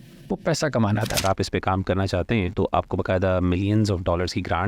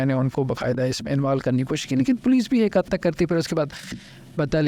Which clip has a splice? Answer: first; 2 cuts; at 1.2 s, 2.5 s

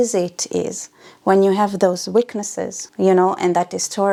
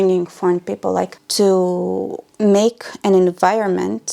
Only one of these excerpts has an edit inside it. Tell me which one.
second; 2 cuts; at 1.2 s, 2.2 s

